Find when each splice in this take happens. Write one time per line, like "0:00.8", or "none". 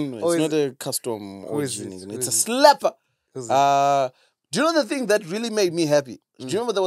none